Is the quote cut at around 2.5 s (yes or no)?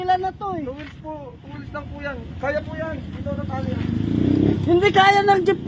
no